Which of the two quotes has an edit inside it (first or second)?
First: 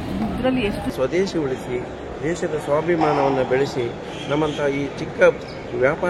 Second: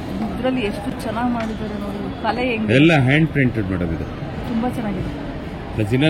first